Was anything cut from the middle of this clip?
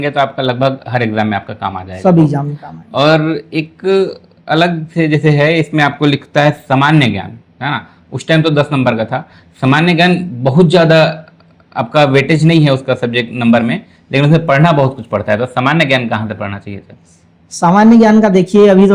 no; 0 cuts

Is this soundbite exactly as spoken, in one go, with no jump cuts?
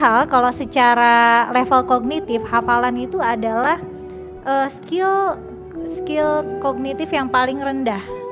yes; 0 cuts

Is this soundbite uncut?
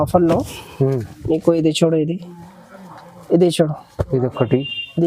yes; 0 cuts

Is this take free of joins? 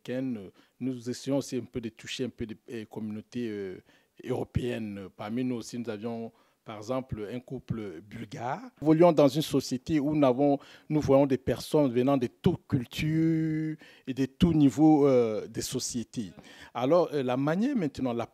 no; 1 cut; at 8.8 s

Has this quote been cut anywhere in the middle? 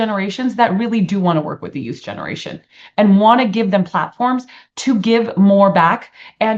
no; 0 cuts

